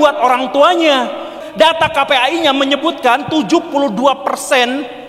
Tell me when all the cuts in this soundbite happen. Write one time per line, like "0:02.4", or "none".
0:01.3